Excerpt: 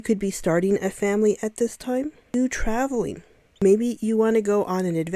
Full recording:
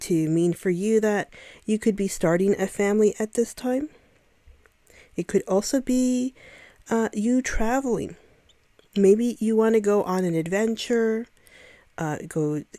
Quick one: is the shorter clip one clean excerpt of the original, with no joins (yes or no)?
no